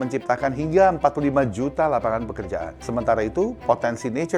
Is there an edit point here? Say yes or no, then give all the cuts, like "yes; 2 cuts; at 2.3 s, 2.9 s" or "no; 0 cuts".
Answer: yes; 1 cut; at 2.8 s